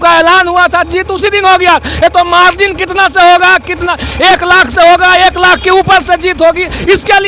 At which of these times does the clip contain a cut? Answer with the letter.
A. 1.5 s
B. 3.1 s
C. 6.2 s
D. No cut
D